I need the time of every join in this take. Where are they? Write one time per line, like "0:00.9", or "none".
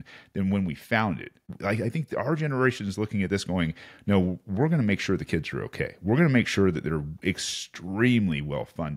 0:01.4